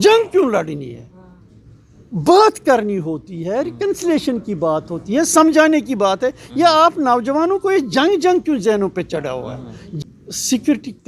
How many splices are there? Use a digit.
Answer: 1